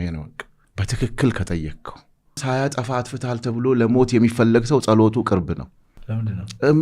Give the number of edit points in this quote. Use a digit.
1